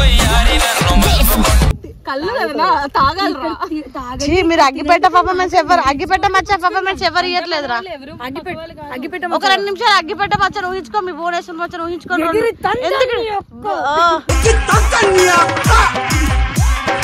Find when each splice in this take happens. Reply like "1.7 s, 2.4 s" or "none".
none